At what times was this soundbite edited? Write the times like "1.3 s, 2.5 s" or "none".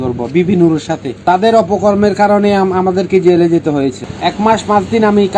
1.2 s, 4.0 s